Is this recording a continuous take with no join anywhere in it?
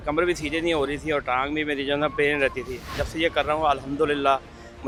yes; 0 cuts

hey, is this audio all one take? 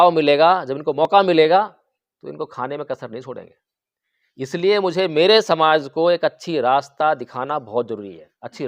yes; 0 cuts

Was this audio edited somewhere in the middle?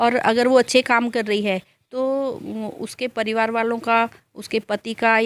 no; 0 cuts

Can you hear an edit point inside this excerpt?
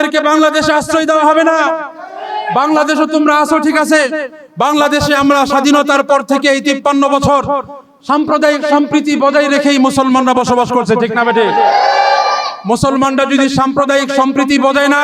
no; 0 cuts

